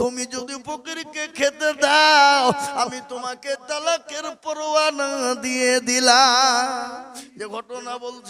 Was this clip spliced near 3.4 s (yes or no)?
no